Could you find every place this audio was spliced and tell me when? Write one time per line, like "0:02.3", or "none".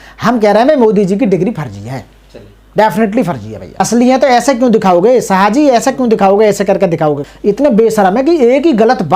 0:03.6
0:07.2